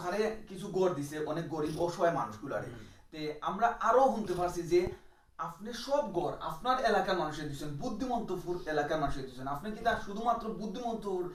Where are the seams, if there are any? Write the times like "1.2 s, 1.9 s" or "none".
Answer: none